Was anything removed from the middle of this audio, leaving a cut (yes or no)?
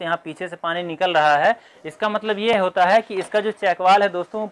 no